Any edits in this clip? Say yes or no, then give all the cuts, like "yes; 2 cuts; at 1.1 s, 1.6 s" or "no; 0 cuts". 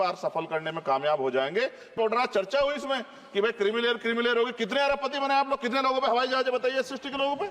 yes; 1 cut; at 1.9 s